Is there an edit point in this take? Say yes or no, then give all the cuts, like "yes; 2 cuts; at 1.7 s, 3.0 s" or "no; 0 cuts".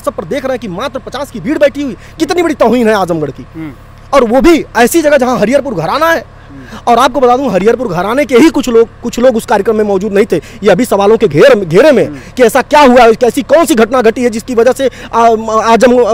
no; 0 cuts